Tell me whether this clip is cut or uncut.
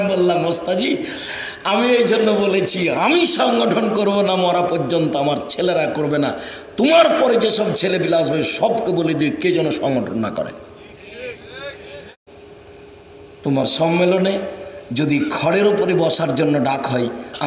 cut